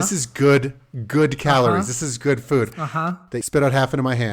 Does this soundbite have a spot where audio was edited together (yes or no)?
yes